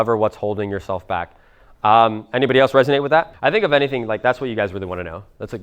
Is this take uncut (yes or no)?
no